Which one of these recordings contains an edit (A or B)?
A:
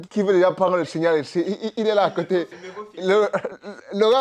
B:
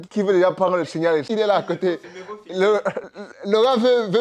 B